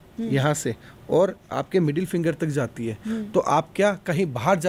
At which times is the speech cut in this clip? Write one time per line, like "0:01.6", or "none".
none